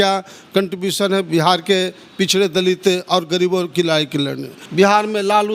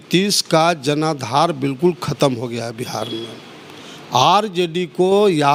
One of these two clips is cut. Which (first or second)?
first